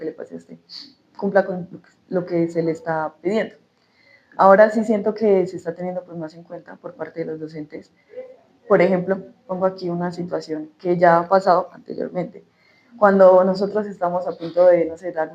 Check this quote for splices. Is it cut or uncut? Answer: uncut